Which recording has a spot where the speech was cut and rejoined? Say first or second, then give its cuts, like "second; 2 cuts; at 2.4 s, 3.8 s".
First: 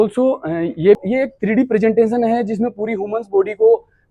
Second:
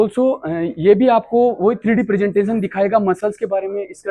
first; 1 cut; at 1.0 s